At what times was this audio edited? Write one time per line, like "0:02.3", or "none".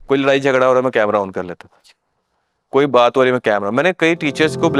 none